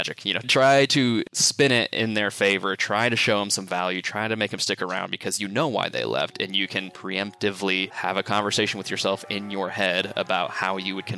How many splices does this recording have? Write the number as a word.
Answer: two